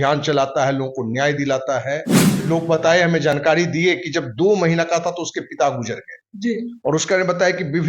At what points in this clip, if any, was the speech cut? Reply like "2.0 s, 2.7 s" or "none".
2.4 s